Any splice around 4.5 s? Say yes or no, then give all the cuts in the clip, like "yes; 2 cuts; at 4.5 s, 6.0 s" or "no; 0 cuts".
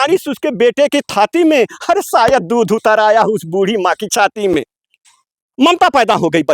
no; 0 cuts